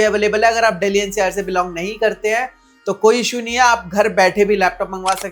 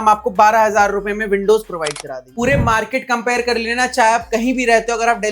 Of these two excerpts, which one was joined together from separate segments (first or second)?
second